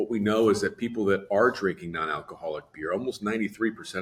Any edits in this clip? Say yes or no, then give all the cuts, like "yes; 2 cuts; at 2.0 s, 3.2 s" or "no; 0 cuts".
no; 0 cuts